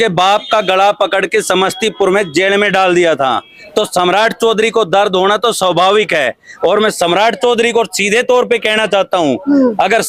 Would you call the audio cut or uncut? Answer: uncut